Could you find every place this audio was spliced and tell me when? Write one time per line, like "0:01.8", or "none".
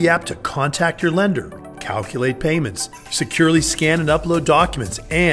none